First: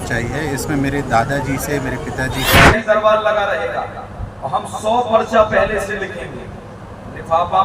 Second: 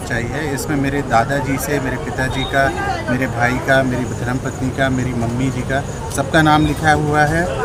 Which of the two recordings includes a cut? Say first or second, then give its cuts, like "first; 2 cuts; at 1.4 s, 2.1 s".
first; 1 cut; at 2.7 s